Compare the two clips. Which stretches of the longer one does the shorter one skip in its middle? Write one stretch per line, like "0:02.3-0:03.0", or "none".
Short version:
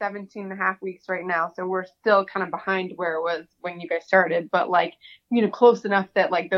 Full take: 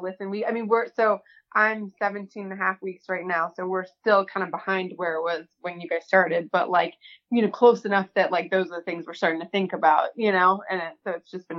none